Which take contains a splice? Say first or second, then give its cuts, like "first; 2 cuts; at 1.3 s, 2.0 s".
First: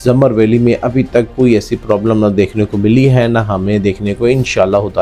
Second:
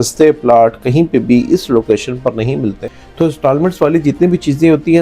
second; 1 cut; at 2.9 s